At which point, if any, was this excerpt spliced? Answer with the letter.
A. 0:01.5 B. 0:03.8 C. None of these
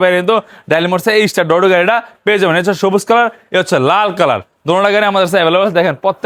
C